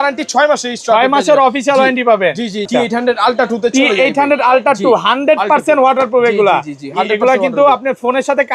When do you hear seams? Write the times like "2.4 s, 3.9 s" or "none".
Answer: 2.7 s